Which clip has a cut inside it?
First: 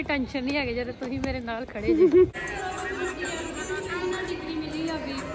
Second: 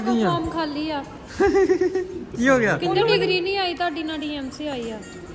first; 1 cut; at 2.3 s

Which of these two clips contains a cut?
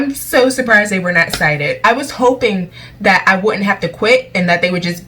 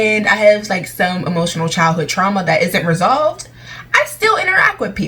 first; 1 cut; at 1.8 s

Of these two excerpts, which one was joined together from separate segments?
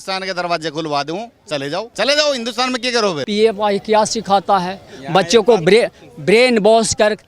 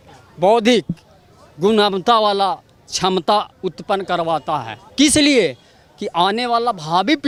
first; 2 cuts; at 1.9 s, 3.2 s

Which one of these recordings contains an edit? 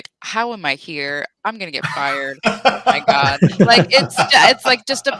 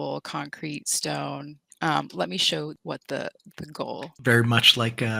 second; 2 cuts; at 2.8 s, 4.1 s

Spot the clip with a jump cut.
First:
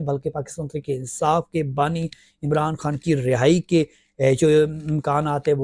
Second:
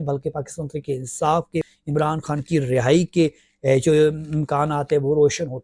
second; 1 cut; at 1.7 s

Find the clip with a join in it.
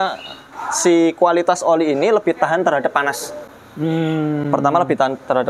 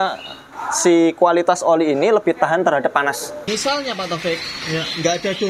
second; 1 cut; at 3.3 s

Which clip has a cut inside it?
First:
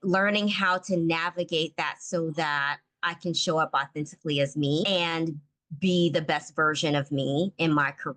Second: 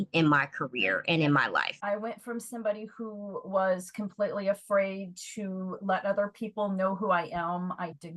second; 1 cut; at 1.7 s

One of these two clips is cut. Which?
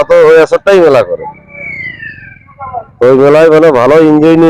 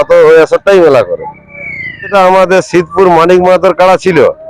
second; 1 cut; at 2.1 s

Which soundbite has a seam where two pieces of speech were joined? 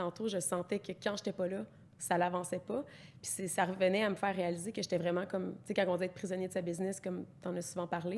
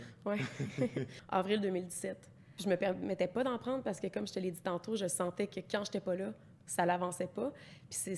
second; 2 cuts; at 1.2 s, 2.6 s

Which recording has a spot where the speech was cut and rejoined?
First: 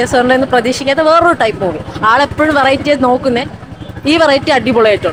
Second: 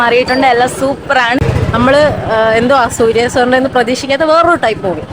second; 1 cut; at 1.4 s

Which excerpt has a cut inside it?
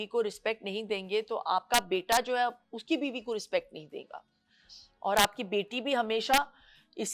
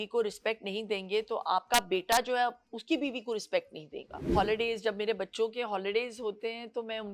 second; 1 cut; at 4.3 s

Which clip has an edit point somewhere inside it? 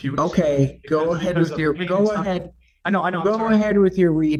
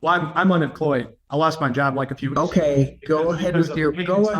second; 1 cut; at 1.2 s

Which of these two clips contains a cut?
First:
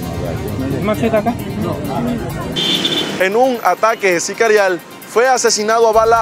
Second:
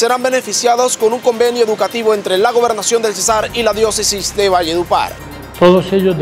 first; 1 cut; at 2.5 s

